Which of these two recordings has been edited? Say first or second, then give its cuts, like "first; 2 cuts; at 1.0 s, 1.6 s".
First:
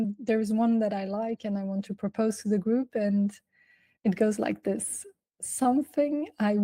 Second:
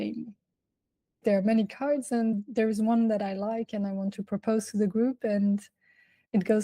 second; 1 cut; at 1.2 s